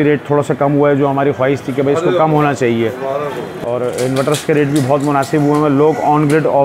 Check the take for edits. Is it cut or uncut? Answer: cut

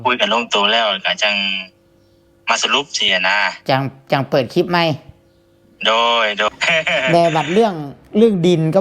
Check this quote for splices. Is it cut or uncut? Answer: cut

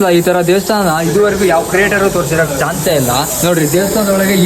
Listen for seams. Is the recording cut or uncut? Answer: uncut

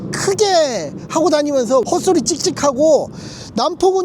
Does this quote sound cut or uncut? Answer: cut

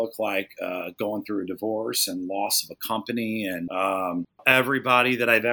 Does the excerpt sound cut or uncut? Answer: cut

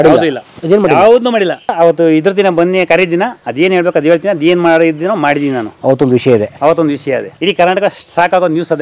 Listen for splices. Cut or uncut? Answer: cut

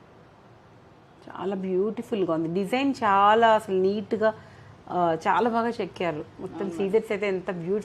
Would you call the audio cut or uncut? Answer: uncut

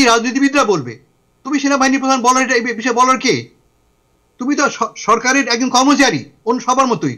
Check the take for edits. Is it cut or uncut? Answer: uncut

